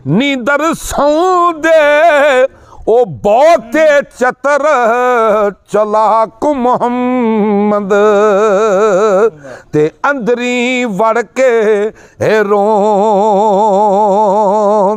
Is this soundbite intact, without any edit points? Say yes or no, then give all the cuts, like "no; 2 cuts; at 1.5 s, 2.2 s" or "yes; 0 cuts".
yes; 0 cuts